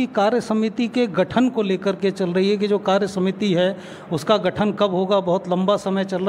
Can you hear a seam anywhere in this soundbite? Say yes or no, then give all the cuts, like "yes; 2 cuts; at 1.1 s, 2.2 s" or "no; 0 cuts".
no; 0 cuts